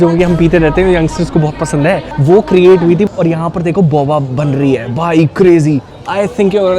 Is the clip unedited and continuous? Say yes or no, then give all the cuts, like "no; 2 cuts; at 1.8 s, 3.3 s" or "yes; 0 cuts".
no; 2 cuts; at 2.1 s, 3.1 s